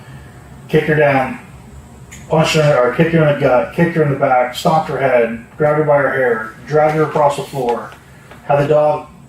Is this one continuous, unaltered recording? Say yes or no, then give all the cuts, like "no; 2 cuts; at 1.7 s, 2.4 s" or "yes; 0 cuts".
yes; 0 cuts